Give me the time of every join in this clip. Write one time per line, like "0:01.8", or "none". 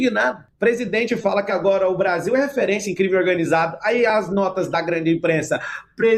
none